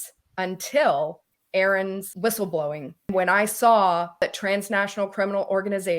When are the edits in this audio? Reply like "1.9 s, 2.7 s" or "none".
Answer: 1.3 s, 2.1 s, 3.1 s, 4.2 s